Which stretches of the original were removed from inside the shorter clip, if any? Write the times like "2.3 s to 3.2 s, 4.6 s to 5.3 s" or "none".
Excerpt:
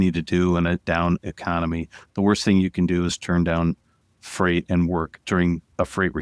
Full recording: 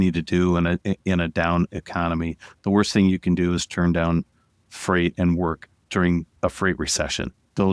0.8 s to 1.3 s, 5.6 s to 5.8 s